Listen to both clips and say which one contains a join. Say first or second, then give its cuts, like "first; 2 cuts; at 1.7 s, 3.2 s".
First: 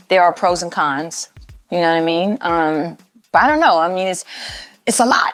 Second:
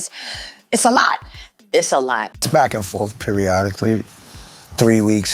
second; 1 cut; at 2.2 s